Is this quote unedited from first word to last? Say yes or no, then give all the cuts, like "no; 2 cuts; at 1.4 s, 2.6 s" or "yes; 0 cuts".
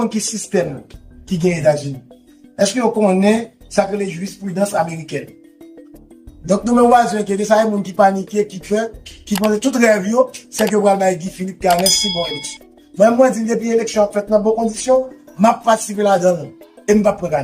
yes; 0 cuts